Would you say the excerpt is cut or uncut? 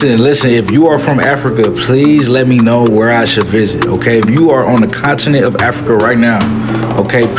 uncut